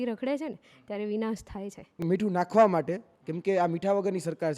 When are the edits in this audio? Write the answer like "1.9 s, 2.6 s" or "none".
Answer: 2.0 s